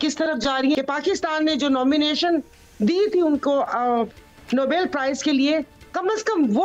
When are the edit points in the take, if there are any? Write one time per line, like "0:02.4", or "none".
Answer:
none